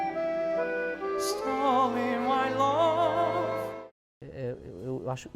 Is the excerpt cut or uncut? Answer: cut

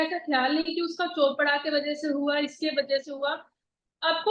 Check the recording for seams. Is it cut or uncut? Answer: uncut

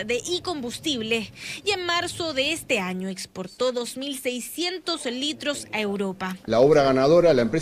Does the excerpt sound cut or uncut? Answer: cut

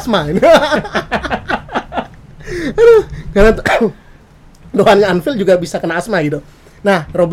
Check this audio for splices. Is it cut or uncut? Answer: uncut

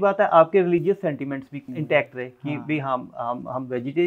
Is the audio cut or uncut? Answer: cut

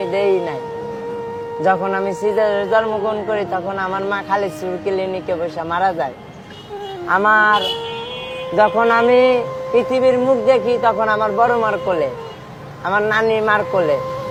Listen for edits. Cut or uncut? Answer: uncut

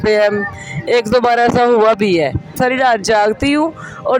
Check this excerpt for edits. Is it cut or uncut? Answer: cut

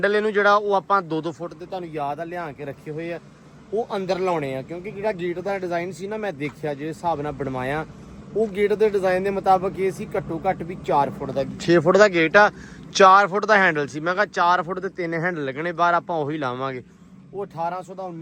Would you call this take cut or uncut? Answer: uncut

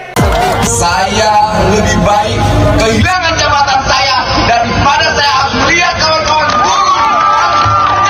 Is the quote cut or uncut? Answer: uncut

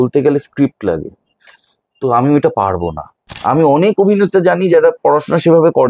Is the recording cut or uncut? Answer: cut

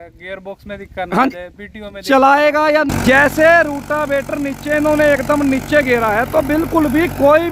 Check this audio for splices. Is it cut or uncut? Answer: cut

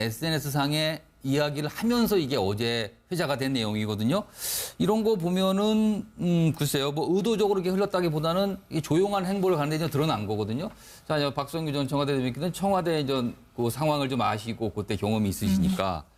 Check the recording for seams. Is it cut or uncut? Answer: uncut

